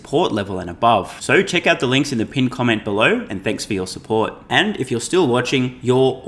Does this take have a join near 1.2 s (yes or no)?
no